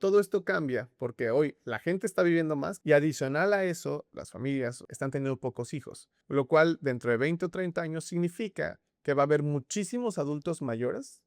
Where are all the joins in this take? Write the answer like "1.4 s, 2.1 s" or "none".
2.7 s, 4.1 s, 4.9 s